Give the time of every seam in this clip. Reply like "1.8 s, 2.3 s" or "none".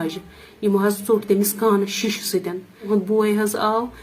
2.7 s